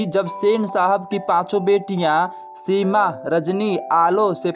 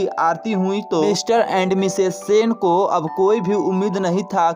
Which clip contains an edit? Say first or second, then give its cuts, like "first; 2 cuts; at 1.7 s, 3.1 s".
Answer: second; 1 cut; at 1.0 s